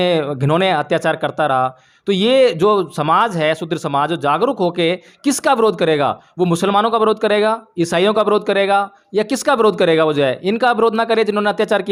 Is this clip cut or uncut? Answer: uncut